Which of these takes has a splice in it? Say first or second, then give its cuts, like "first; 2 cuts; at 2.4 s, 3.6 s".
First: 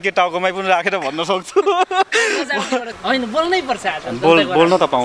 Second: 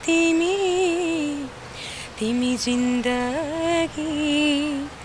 first; 1 cut; at 2.9 s